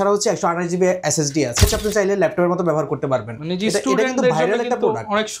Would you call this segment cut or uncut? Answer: cut